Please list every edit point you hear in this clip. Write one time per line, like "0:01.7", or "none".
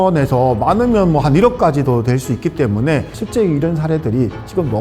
0:03.1